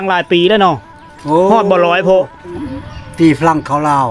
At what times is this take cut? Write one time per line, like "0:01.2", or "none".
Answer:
0:02.5